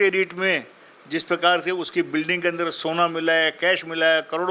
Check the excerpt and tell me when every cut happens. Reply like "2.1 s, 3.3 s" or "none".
none